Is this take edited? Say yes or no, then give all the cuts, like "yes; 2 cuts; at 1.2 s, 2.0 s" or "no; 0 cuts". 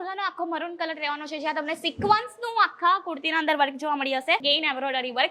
yes; 1 cut; at 4.4 s